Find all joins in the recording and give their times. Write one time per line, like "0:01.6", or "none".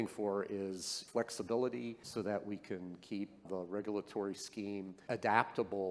0:01.0
0:02.0
0:03.4
0:05.0